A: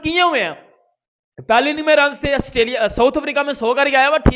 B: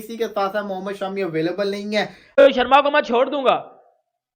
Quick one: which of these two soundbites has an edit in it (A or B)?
B